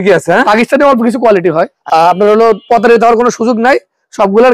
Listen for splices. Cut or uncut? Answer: cut